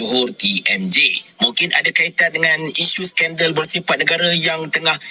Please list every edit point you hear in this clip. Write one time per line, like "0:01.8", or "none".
0:01.2